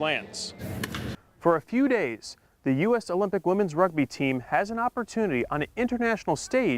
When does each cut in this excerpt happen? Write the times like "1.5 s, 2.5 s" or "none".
1.1 s